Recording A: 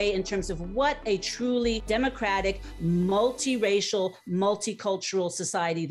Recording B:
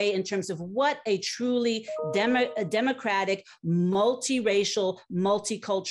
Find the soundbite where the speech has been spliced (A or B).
A